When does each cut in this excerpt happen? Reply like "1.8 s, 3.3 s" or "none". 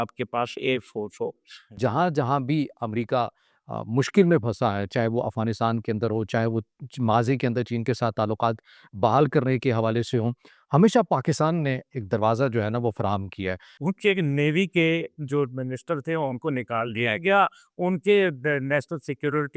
1.8 s, 13.7 s

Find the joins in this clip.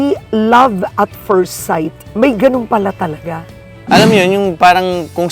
3.8 s

